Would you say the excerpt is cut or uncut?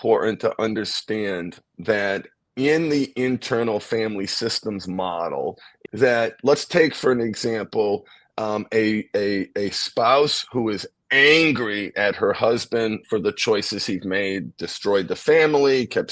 cut